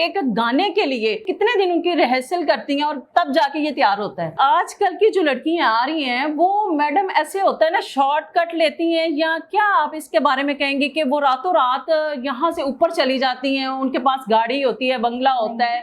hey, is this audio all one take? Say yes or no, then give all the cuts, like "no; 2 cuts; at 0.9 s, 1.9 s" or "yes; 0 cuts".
no; 2 cuts; at 1.3 s, 4.4 s